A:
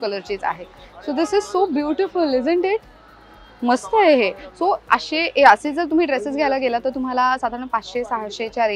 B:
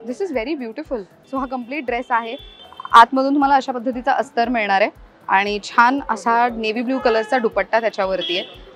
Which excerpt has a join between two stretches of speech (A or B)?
B